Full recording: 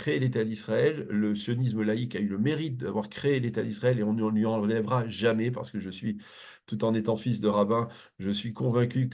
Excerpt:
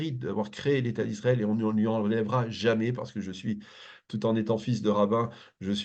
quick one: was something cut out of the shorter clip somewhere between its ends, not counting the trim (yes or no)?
no